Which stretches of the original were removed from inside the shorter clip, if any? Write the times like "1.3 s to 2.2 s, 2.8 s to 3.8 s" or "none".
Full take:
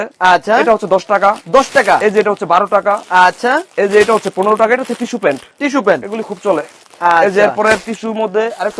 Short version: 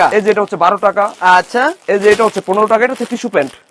none